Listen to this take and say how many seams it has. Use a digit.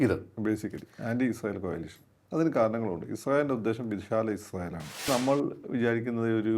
1